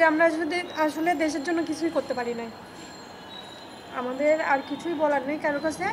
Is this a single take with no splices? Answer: yes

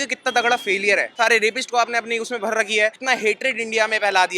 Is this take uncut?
no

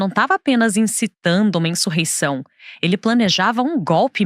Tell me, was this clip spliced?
no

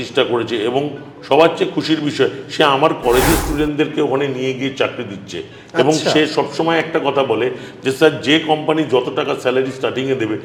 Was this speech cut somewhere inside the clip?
no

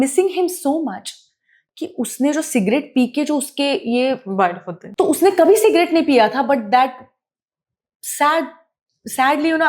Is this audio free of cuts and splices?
no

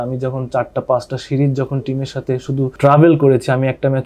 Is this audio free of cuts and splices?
no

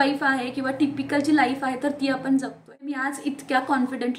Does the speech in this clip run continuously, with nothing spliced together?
no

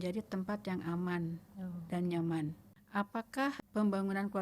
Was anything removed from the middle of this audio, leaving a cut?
yes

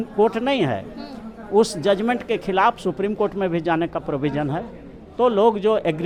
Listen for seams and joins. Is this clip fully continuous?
yes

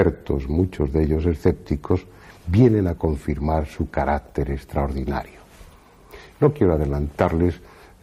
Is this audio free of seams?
no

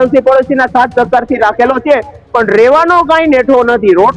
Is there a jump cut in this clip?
no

